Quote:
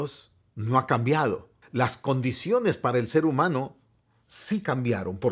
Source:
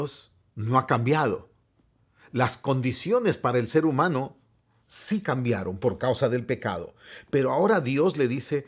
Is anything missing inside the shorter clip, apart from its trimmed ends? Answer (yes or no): yes